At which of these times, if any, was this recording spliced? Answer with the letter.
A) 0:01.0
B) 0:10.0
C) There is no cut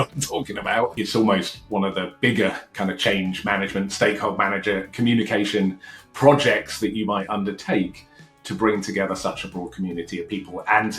A